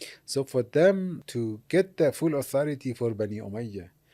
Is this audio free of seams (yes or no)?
no